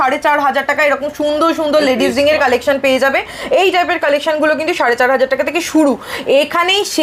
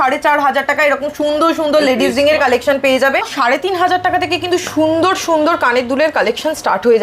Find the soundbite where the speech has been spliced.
second; 1 cut; at 3.3 s

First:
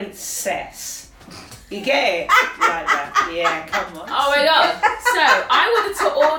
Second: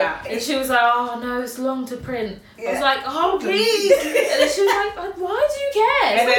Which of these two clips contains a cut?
first; 1 cut; at 4.0 s

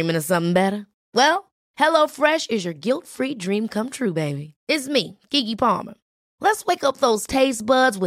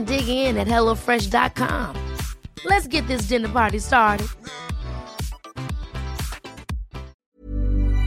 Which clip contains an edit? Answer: second; 1 cut; at 7.2 s

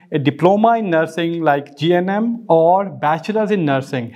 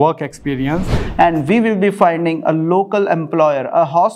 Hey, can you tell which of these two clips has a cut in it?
second; 1 cut; at 1.0 s

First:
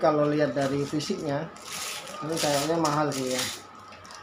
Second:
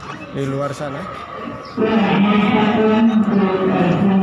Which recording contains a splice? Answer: second; 1 cut; at 1.0 s

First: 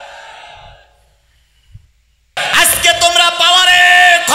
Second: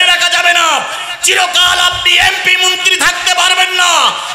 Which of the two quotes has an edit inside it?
first; 1 cut; at 2.4 s

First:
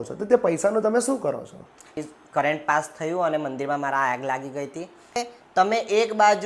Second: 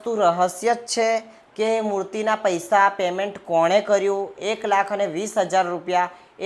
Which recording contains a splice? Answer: first; 2 cuts; at 2.0 s, 5.2 s

